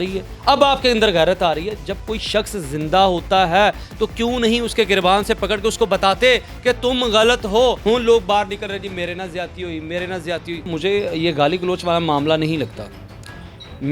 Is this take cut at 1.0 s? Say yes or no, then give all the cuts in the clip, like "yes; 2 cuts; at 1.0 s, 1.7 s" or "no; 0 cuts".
no; 2 cuts; at 7.8 s, 10.6 s